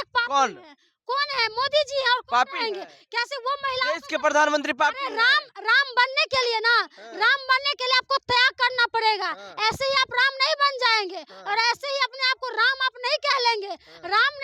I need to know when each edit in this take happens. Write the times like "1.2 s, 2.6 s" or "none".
none

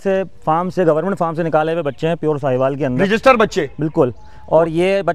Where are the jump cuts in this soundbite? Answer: none

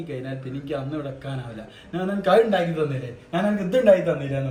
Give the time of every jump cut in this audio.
none

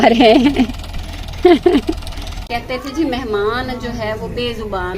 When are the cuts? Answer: 2.4 s

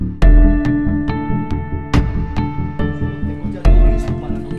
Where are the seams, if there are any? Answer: none

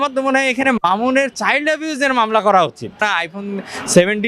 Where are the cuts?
3.1 s

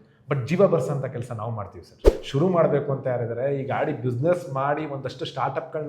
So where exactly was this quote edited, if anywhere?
2.1 s

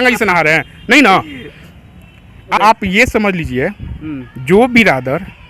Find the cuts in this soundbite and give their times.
2.5 s

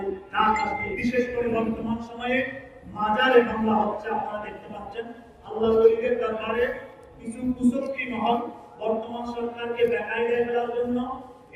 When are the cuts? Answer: 0.9 s

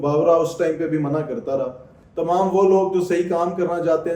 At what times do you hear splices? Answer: 1.9 s

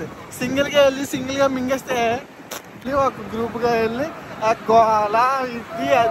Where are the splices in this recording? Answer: 2.9 s

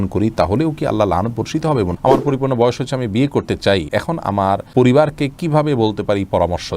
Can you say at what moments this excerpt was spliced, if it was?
1.9 s, 4.3 s

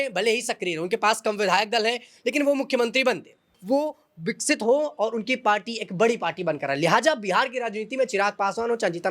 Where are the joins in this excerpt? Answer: 3.5 s

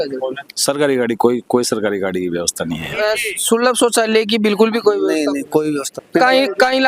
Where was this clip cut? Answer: 2.9 s

